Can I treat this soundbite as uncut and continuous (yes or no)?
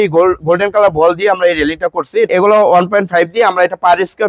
no